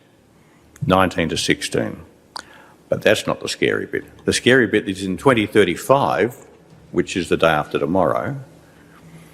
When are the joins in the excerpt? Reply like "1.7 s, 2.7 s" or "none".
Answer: 4.1 s